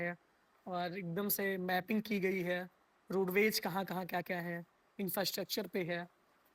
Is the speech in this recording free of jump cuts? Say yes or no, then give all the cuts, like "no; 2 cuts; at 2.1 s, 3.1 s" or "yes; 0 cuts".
yes; 0 cuts